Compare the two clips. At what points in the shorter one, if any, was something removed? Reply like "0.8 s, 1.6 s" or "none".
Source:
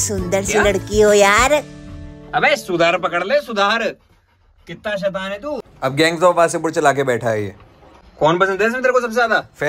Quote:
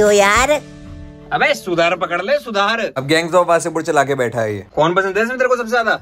3.0 s, 4.6 s